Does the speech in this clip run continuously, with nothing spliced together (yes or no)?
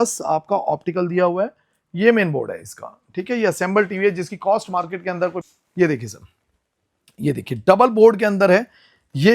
no